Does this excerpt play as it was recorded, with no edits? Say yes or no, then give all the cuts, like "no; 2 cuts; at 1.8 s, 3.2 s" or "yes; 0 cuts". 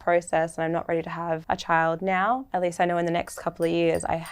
no; 2 cuts; at 1.4 s, 2.5 s